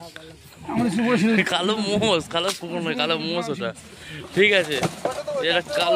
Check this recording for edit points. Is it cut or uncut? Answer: uncut